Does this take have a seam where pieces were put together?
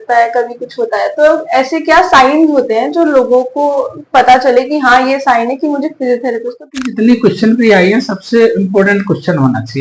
yes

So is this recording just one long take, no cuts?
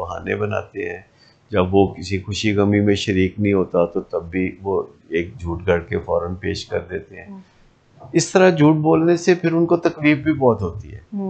yes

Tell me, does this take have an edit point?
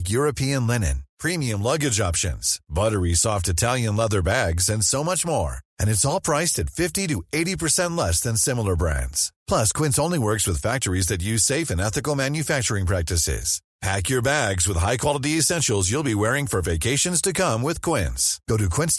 no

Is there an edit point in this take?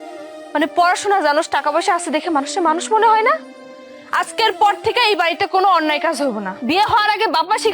yes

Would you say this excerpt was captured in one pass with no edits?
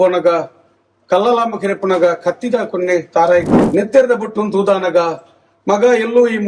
no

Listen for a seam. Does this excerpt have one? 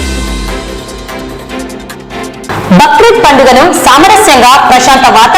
yes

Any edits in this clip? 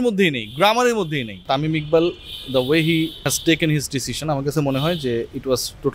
yes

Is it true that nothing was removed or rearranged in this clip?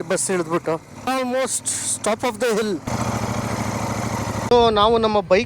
no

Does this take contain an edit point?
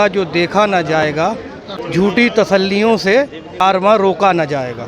yes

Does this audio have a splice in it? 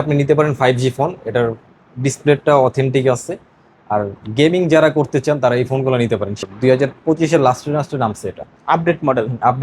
yes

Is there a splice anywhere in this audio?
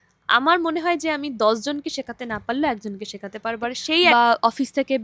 yes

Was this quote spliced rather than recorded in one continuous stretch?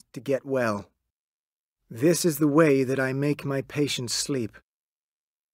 yes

